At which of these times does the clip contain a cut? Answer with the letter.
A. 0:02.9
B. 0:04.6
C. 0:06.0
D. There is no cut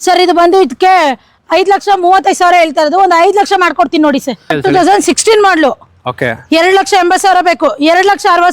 B